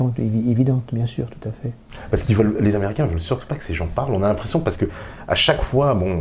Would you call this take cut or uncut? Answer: uncut